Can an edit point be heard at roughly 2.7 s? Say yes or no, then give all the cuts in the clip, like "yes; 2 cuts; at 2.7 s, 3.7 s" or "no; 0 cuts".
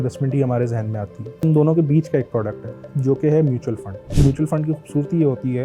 no; 2 cuts; at 1.4 s, 4.1 s